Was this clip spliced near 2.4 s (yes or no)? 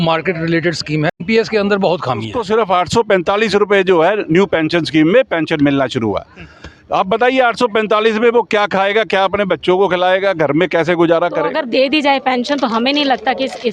yes